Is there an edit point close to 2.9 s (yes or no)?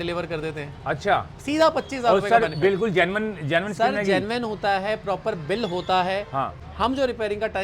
no